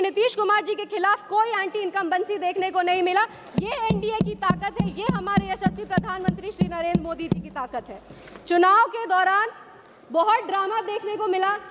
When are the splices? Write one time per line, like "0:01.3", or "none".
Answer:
none